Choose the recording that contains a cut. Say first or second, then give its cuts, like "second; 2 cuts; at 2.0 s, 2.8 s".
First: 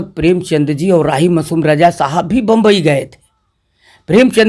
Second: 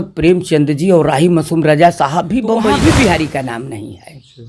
second; 1 cut; at 2.7 s